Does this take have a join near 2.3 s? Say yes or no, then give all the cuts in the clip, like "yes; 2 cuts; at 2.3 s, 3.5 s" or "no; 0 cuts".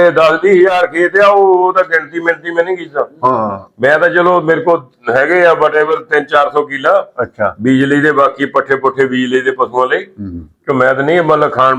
no; 0 cuts